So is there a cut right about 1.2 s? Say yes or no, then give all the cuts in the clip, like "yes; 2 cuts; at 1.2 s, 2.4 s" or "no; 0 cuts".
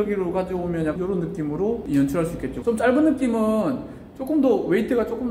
yes; 2 cuts; at 1.2 s, 2.6 s